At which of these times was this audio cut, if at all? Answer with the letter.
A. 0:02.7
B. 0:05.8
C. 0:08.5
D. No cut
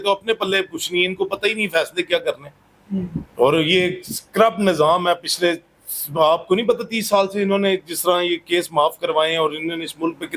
D